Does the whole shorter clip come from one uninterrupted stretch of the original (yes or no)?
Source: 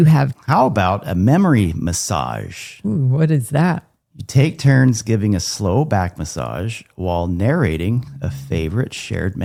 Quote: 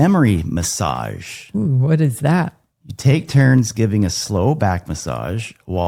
yes